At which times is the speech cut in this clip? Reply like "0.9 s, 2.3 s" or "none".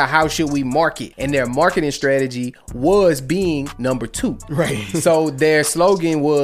1.1 s